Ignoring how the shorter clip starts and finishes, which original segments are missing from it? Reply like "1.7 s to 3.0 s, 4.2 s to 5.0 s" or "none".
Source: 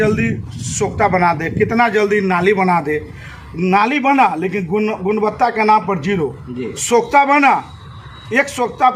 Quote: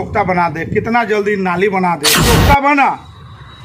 3.0 s to 6.8 s